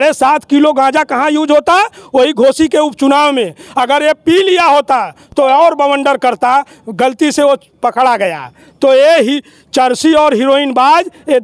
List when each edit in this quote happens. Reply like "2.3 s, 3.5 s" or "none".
none